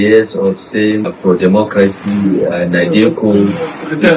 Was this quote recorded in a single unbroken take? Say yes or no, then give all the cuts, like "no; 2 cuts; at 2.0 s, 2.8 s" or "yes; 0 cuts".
no; 1 cut; at 1.1 s